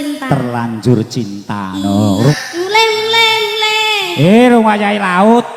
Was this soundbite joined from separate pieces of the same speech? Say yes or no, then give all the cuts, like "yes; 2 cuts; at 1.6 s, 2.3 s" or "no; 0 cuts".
yes; 1 cut; at 2.3 s